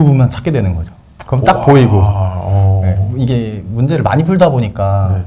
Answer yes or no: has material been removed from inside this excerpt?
no